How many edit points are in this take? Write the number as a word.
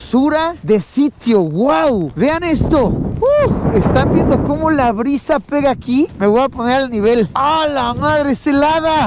zero